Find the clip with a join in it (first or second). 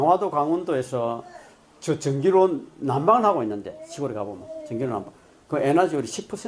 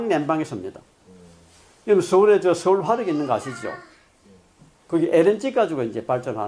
second